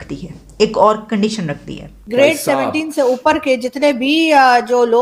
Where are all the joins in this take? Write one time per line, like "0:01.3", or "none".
0:01.8